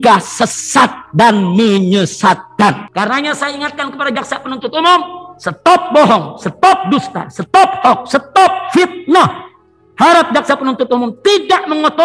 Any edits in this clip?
yes; 1 cut; at 2.8 s

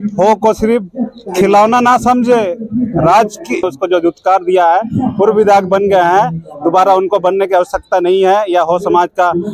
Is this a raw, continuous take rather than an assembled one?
no; 1 cut; at 3.7 s

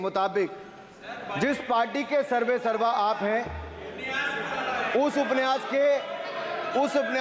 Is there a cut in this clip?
no; 0 cuts

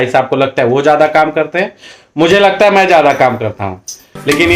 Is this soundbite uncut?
yes; 0 cuts

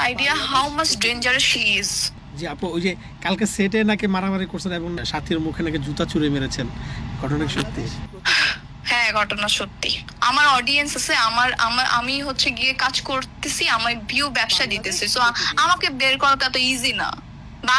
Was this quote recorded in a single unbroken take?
no; 2 cuts; at 2.1 s, 10.0 s

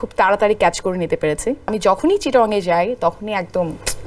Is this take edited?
yes; 1 cut; at 1.7 s

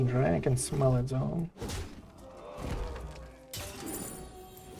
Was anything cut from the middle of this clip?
no; 0 cuts

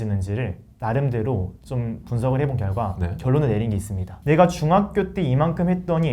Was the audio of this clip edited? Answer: yes; 1 cut; at 4.1 s

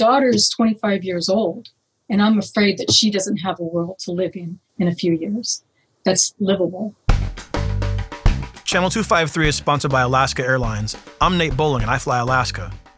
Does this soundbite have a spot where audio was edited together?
yes; 1 cut; at 7.1 s

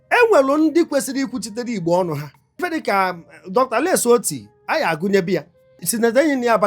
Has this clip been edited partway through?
yes; 2 cuts; at 2.6 s, 5.9 s

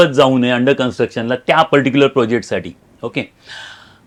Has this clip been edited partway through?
no; 0 cuts

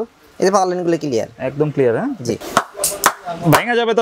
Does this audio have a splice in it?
yes; 1 cut; at 2.4 s

